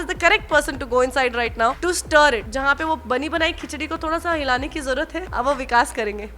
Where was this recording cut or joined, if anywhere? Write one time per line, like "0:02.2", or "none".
0:01.8
0:02.5
0:05.2